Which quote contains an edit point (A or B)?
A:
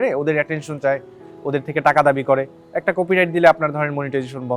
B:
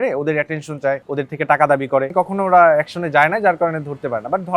B